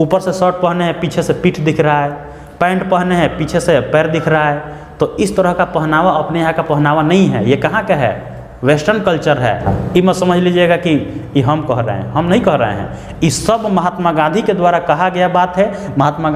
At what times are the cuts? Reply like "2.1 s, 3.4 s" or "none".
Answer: 9.7 s